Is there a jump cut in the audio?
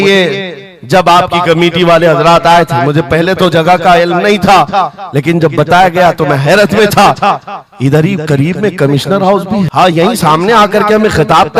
yes; 1 cut; at 9.7 s

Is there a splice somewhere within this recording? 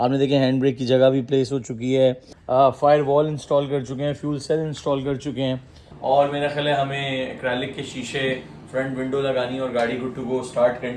yes; 2 cuts; at 2.3 s, 5.9 s

